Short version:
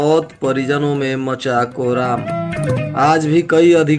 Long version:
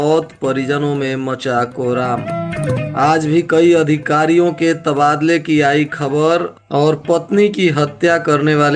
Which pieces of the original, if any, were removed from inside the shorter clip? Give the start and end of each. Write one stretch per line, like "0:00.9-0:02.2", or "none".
none